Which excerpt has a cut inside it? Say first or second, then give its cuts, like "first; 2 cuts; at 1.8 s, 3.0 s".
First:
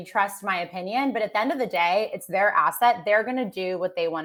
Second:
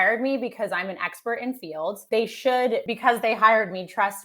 second; 2 cuts; at 2.0 s, 2.9 s